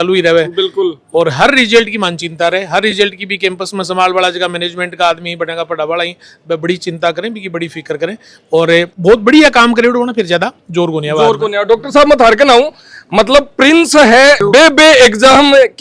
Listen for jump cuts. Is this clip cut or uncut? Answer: uncut